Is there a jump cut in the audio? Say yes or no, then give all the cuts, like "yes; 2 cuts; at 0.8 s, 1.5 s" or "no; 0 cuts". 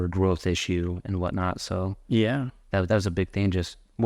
no; 0 cuts